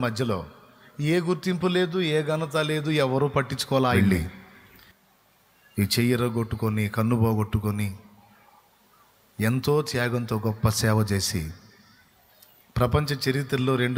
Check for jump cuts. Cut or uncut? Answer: cut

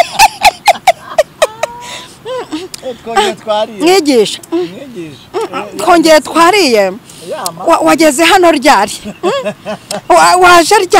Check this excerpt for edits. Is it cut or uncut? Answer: uncut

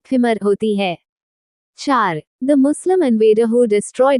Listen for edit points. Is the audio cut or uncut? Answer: cut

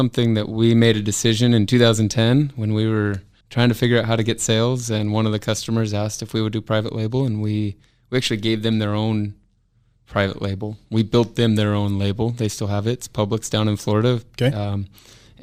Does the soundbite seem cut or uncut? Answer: uncut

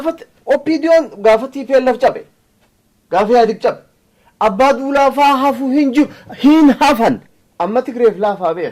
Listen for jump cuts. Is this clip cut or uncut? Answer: cut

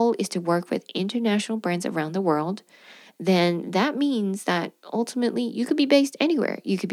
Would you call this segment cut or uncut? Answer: uncut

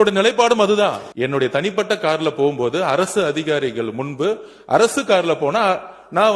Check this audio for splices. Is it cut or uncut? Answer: cut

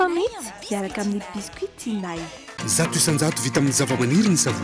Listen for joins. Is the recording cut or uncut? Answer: cut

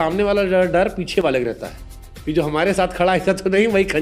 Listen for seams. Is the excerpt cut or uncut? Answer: uncut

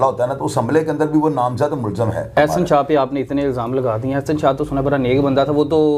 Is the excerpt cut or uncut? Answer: cut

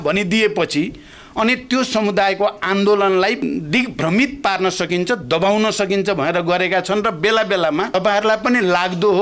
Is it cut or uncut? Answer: cut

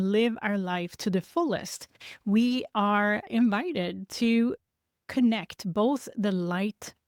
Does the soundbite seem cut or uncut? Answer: uncut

